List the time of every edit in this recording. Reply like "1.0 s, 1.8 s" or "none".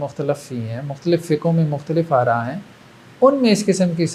none